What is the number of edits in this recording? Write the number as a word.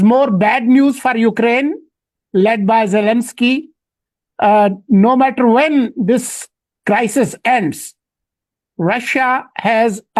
zero